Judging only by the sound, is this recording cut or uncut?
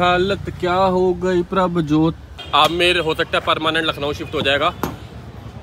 cut